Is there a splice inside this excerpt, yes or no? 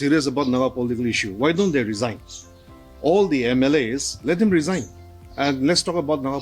no